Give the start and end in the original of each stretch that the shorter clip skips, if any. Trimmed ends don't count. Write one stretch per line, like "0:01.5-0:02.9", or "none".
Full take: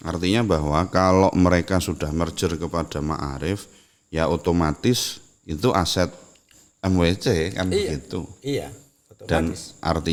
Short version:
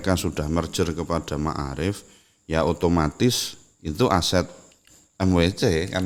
none